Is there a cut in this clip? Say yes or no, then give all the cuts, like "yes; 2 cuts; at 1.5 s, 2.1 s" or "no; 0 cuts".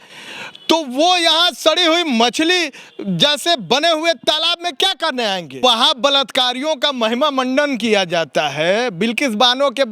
yes; 1 cut; at 5.6 s